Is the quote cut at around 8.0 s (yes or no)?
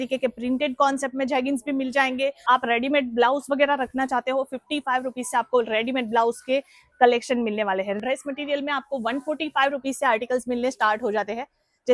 yes